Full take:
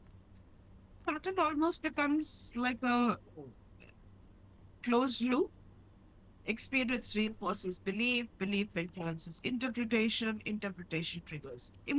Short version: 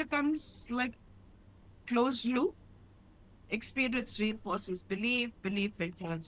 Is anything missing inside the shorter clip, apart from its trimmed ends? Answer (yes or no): yes